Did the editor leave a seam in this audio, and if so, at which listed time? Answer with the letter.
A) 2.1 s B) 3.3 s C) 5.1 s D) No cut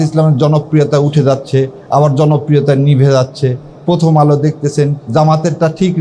C